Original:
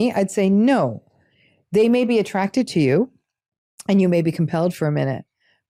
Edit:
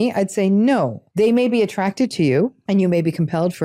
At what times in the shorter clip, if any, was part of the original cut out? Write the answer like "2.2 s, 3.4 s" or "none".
1.0 s, 2.6 s

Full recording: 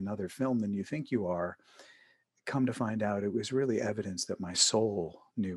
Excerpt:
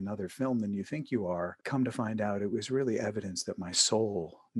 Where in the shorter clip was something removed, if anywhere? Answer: 1.6 s

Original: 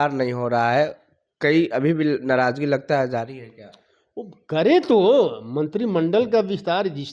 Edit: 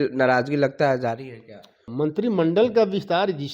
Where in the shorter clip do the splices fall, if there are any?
1.9 s

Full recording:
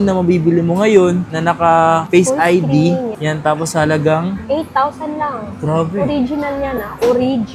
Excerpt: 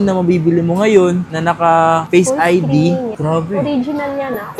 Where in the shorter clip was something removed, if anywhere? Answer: 3.1 s

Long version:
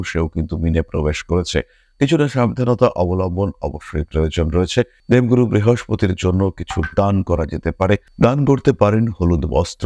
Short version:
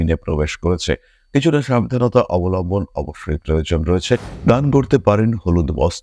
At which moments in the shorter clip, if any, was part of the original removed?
4.3 s

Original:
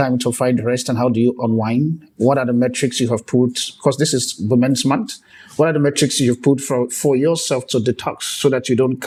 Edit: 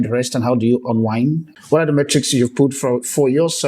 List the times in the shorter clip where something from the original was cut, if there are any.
1.5 s

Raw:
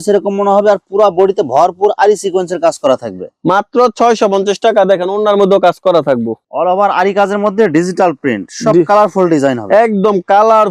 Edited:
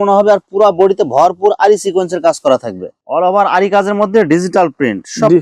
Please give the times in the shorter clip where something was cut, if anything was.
2.9 s

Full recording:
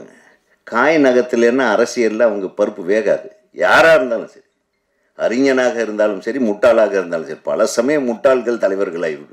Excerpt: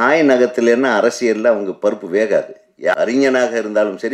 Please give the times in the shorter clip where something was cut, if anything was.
2.9 s

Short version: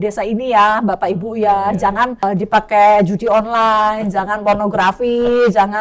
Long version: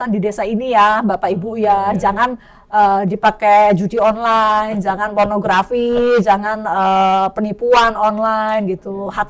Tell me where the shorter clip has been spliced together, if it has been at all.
2.2 s

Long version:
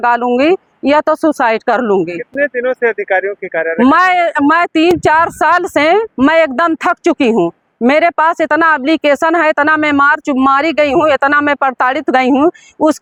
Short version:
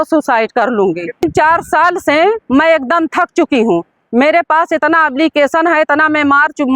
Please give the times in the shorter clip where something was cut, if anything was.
1.2 s

